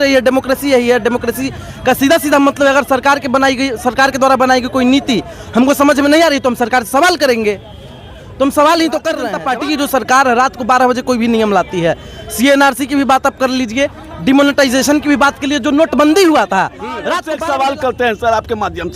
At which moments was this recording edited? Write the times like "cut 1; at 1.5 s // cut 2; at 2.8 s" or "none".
cut 1; at 9.3 s // cut 2; at 17.2 s